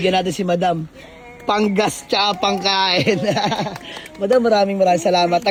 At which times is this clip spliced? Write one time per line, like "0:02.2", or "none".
none